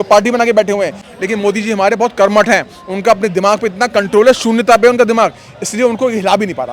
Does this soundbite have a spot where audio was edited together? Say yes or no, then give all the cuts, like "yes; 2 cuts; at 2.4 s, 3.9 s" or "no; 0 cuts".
yes; 1 cut; at 1.0 s